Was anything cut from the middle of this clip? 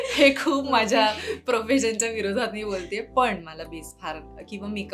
no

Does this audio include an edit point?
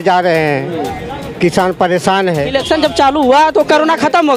yes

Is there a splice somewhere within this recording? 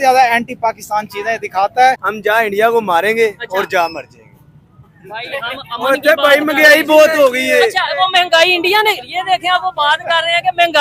yes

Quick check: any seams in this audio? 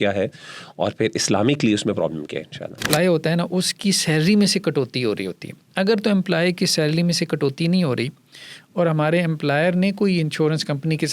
yes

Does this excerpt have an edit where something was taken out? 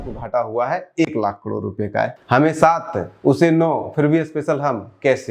yes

